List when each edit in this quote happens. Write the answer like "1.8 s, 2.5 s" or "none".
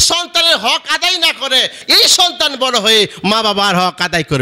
1.8 s